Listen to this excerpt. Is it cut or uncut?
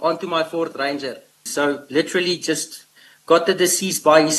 cut